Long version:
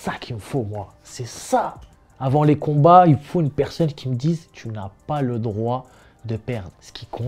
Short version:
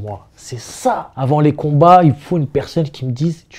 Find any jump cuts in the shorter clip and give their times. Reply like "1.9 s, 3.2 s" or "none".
1.1 s